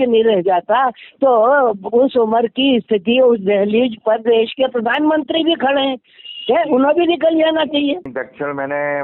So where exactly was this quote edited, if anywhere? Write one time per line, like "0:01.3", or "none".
0:08.1